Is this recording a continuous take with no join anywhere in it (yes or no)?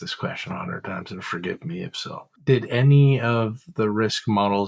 no